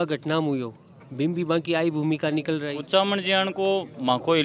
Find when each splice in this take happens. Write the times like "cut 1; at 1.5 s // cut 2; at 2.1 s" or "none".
cut 1; at 2.8 s

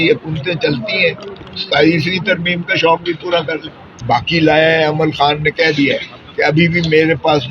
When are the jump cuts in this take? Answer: cut 1; at 3.9 s

